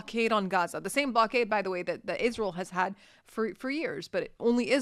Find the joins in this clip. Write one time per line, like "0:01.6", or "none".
none